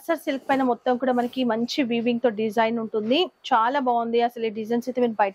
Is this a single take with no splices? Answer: yes; 0 cuts

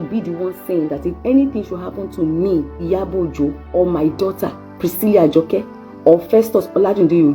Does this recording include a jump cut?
yes; 1 cut; at 3.3 s

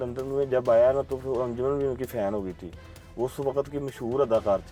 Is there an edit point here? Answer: no; 0 cuts

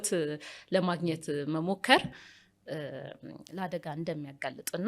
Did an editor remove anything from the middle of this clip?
no; 0 cuts

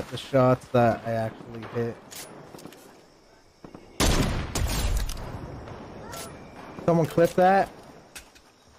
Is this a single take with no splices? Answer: yes; 0 cuts

